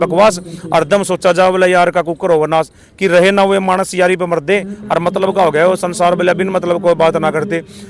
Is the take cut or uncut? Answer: uncut